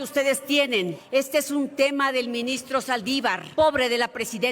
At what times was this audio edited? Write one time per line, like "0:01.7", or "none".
0:01.0
0:03.4

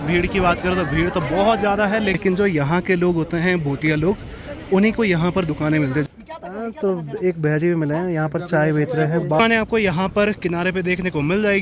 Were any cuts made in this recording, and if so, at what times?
0:02.2
0:06.0
0:09.4

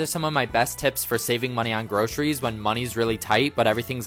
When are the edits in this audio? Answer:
none

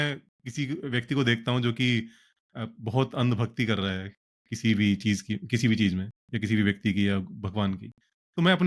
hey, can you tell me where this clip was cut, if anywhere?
none

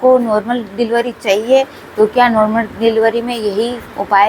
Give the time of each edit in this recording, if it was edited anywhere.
none

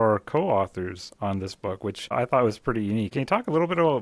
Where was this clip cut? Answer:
0:02.1
0:03.1

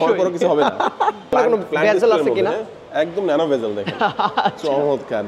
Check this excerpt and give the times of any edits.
0:01.3

